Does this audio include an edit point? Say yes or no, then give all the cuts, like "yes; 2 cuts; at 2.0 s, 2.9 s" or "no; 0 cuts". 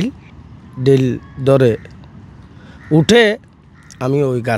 no; 0 cuts